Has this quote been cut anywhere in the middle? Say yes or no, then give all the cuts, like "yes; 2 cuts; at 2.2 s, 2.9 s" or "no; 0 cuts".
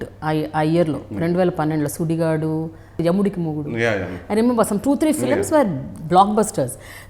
no; 0 cuts